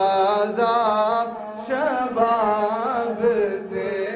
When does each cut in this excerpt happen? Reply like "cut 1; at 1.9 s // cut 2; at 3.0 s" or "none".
none